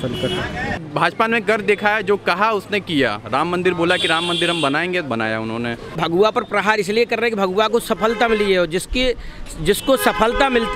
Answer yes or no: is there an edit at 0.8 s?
yes